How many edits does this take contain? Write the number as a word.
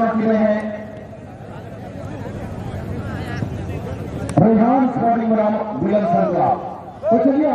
zero